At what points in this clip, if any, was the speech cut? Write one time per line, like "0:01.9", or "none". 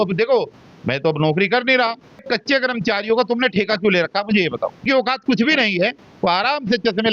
0:02.2
0:04.8